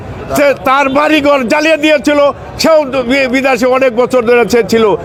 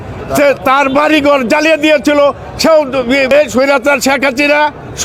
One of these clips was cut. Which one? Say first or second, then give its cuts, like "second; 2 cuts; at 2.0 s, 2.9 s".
second; 1 cut; at 3.5 s